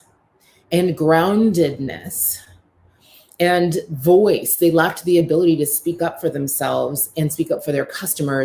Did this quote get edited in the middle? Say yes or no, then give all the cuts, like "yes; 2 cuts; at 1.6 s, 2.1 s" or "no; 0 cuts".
no; 0 cuts